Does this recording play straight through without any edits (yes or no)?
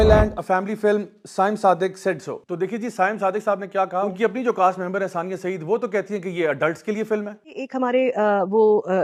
yes